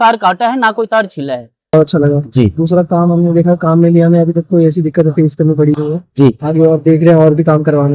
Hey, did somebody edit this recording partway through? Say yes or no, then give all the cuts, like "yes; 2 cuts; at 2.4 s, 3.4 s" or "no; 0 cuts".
yes; 1 cut; at 1.7 s